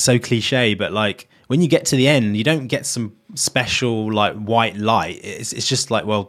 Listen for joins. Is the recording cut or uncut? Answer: cut